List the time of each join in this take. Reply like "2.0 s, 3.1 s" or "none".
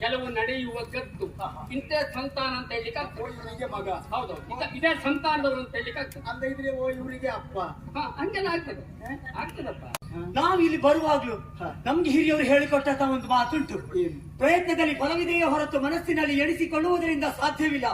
9.9 s